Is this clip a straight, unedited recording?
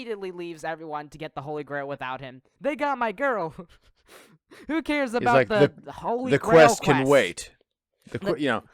no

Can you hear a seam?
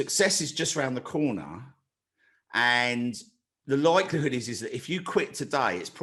no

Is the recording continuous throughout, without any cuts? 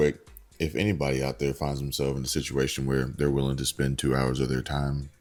yes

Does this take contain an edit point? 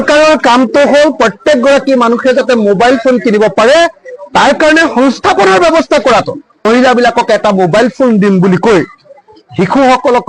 yes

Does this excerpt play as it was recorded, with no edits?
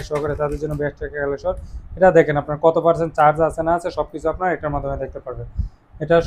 yes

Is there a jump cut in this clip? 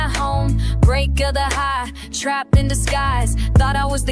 no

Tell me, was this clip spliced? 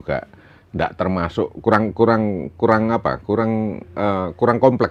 no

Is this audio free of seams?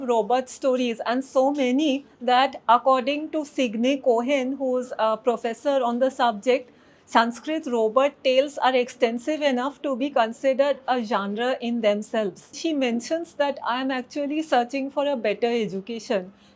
no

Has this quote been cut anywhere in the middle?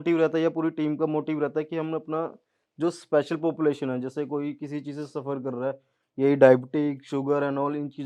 no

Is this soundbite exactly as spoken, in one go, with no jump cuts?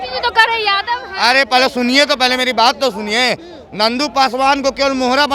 yes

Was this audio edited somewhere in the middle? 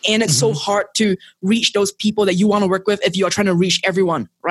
no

